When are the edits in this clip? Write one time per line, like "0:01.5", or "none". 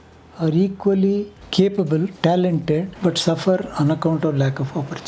0:01.4
0:02.1
0:02.9